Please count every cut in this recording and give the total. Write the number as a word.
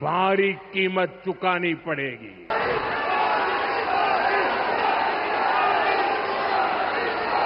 one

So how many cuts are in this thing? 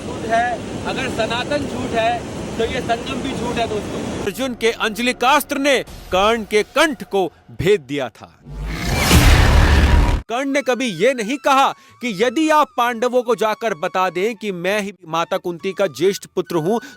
three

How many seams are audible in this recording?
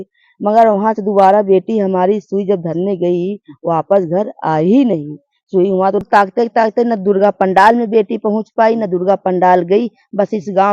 one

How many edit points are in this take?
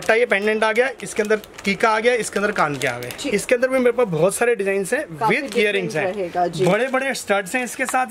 one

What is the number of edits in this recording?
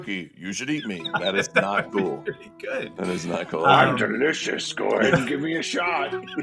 zero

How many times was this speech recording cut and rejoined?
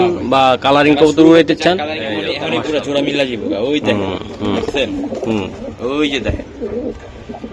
one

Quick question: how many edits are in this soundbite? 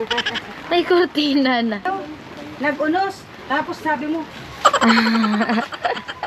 one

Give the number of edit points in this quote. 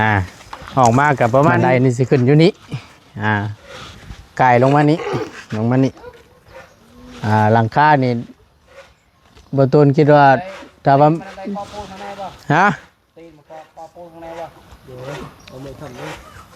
one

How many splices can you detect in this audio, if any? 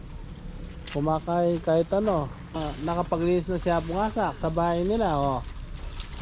one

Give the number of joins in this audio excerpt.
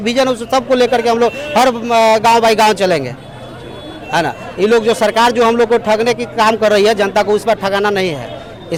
zero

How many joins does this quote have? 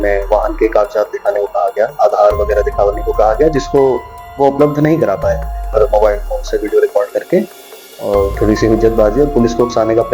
one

